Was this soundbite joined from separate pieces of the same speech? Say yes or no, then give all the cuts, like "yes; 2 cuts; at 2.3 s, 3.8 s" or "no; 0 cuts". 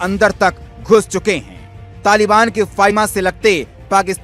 yes; 1 cut; at 2.9 s